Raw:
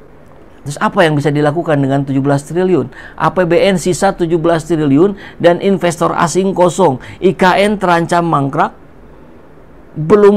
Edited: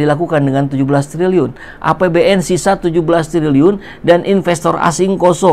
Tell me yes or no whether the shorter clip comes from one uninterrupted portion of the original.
yes